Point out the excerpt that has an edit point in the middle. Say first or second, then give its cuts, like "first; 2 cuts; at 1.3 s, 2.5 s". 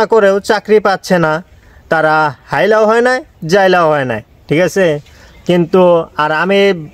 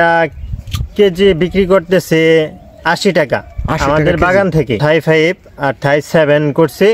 second; 1 cut; at 4.8 s